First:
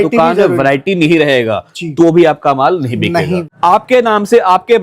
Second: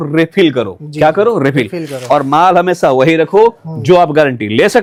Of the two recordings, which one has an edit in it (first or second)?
first